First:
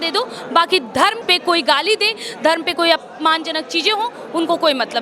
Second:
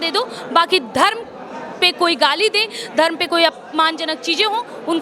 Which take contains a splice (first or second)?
first